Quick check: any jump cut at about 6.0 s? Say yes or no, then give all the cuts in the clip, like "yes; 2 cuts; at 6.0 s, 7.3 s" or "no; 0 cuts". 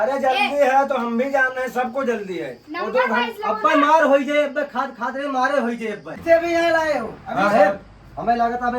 yes; 1 cut; at 6.0 s